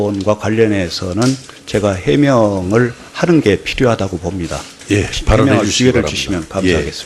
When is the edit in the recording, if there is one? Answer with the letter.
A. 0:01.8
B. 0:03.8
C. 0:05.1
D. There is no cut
B